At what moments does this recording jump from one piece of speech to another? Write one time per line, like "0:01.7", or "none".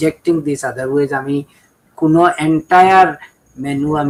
none